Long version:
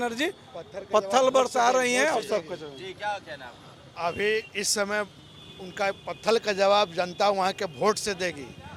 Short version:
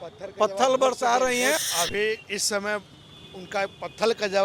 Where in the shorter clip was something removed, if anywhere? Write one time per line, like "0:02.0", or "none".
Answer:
0:01.6